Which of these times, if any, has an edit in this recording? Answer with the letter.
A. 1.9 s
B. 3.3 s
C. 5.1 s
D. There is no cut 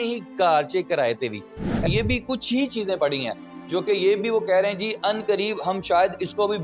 A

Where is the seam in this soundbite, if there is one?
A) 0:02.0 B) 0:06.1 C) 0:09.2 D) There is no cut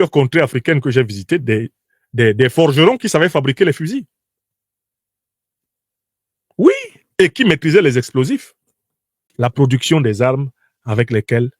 C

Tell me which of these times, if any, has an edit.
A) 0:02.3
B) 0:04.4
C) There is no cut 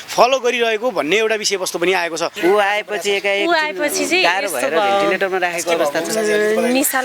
A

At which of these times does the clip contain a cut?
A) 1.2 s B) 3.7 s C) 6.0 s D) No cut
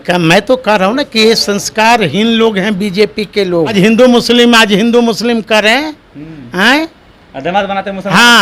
B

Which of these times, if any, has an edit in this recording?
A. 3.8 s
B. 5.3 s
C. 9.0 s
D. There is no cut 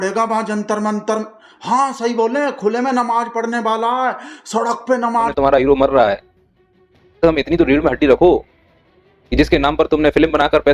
B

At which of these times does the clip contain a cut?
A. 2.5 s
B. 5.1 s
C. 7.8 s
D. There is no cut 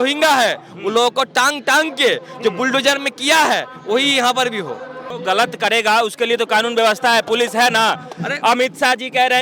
B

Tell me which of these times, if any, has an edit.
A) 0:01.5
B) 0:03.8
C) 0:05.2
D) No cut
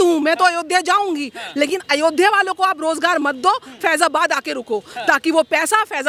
D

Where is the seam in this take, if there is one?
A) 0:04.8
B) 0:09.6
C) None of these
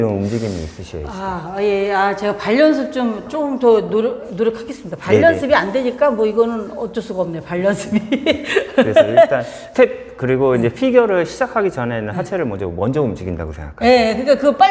B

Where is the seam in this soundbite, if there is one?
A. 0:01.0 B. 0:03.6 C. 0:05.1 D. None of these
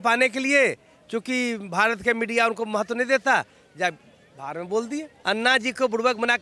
C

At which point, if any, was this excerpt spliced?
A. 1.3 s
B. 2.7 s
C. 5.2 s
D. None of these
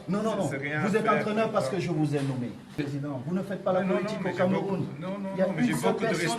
B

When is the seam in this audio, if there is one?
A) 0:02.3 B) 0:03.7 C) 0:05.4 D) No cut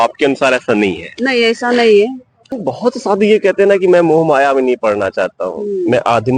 A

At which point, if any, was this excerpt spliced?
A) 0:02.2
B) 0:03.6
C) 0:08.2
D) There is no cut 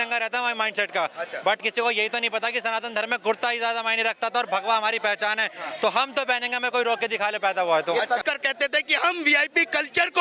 C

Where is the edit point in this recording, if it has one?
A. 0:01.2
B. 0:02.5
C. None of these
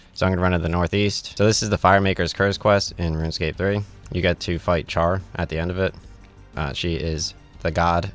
A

